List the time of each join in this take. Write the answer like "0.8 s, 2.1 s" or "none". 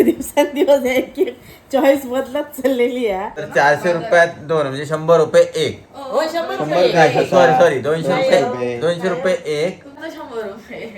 3.4 s, 9.9 s